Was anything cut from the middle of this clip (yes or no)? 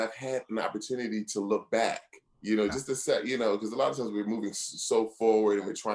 no